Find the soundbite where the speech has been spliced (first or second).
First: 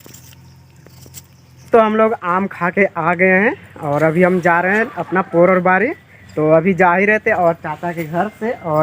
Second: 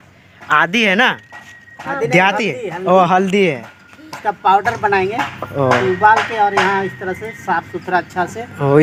first